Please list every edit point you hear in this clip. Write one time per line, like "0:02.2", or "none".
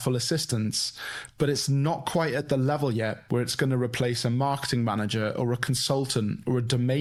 none

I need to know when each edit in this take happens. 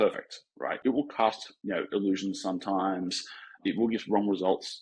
0:00.8
0:01.5
0:03.6

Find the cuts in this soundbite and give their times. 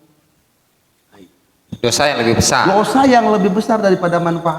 none

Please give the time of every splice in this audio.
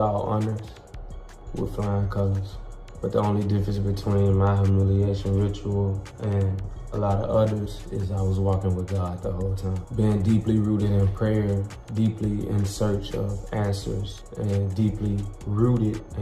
0:02.5

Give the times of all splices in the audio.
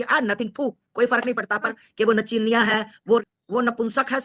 0:01.7
0:03.2

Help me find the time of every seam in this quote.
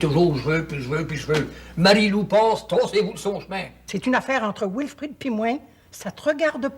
0:03.9

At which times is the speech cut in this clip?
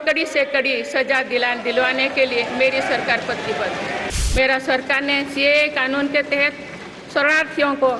0:04.1

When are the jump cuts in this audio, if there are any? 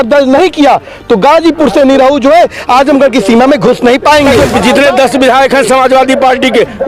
0:04.4

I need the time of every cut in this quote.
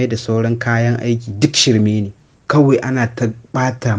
0:02.2

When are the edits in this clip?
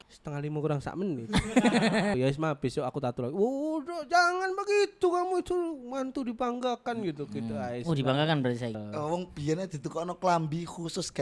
0:02.1
0:08.8

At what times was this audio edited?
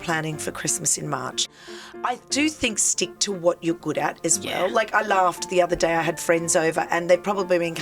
0:01.4

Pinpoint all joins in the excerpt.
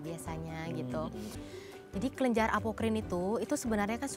0:01.4

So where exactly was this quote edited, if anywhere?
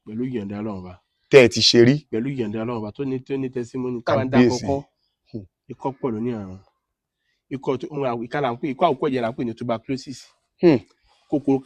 none

